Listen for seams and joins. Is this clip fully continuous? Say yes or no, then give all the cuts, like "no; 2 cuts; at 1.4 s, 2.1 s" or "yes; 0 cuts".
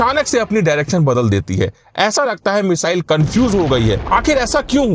no; 1 cut; at 4.0 s